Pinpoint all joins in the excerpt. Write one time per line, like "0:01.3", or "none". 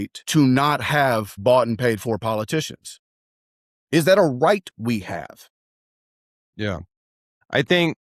none